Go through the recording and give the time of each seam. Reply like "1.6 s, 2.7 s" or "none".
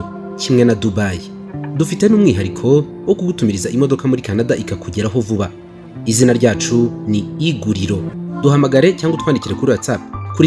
8.1 s

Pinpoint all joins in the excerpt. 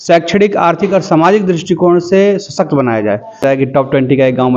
3.4 s

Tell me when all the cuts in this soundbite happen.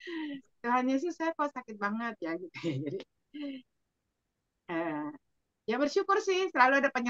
none

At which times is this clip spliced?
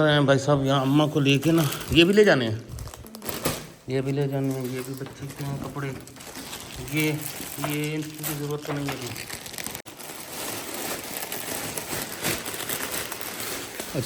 9.9 s

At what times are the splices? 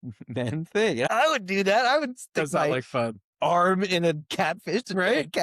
1.1 s

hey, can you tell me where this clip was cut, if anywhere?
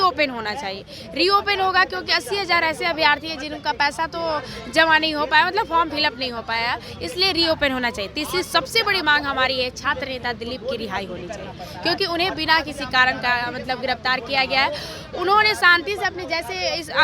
none

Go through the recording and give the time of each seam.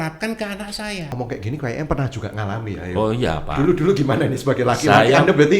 1.1 s

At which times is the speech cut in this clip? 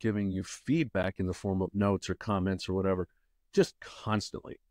none

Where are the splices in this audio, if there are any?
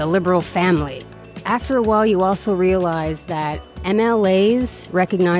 1.0 s

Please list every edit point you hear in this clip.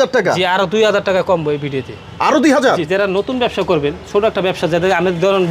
2.9 s

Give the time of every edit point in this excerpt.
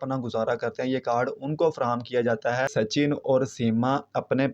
2.7 s

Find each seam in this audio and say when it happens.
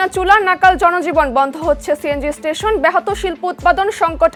none

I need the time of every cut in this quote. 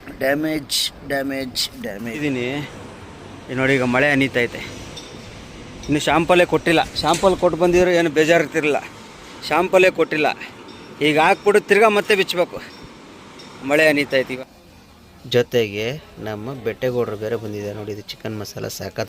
2.2 s, 14.3 s

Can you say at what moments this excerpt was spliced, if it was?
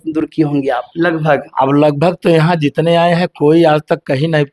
none

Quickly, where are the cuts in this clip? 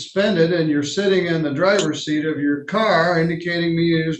none

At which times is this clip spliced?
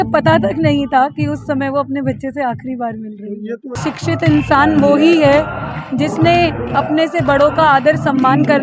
3.8 s

